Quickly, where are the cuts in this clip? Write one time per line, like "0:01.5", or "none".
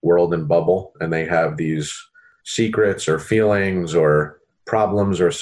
0:02.3